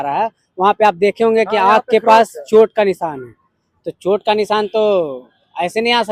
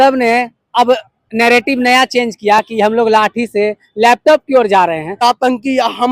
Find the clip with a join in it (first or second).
second